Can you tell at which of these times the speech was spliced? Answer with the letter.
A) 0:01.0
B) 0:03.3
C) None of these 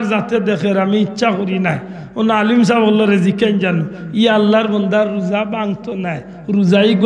C